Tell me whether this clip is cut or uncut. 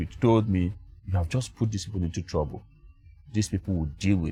uncut